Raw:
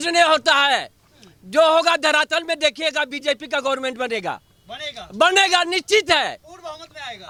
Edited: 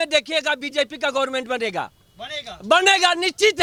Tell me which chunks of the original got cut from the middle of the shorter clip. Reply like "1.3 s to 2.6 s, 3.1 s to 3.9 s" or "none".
none